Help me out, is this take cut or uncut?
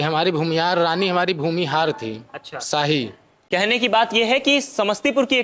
cut